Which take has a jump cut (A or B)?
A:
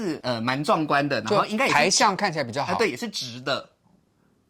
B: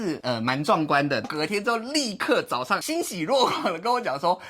B